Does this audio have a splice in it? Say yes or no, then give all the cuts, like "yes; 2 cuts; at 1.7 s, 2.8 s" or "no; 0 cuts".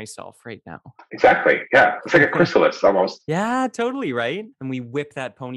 yes; 1 cut; at 4.5 s